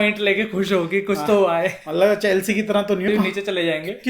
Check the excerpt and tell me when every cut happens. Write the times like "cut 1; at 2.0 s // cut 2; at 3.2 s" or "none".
cut 1; at 3.1 s